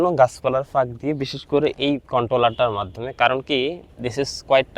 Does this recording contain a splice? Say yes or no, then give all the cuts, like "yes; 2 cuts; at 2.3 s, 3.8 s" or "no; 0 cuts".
yes; 1 cut; at 3.9 s